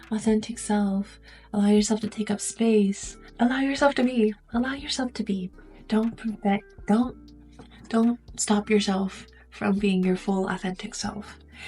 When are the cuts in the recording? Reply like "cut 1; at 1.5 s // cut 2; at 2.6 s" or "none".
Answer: cut 1; at 3.2 s